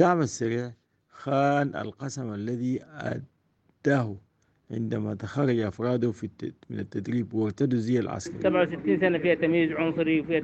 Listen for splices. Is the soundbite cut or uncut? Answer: cut